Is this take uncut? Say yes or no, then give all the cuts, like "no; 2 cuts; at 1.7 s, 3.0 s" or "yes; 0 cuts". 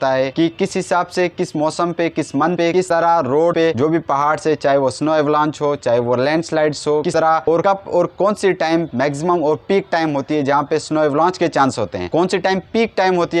yes; 0 cuts